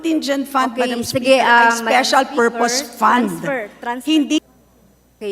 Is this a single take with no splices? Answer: no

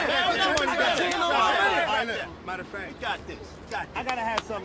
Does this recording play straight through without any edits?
yes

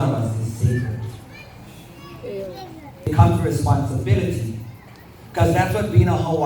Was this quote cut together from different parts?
yes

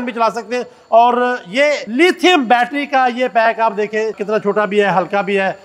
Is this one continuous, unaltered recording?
no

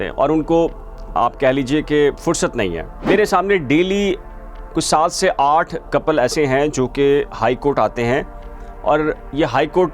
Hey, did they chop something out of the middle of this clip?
yes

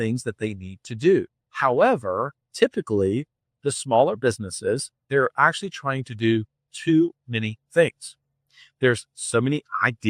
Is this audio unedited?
no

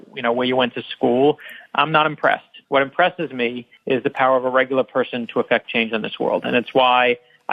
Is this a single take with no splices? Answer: no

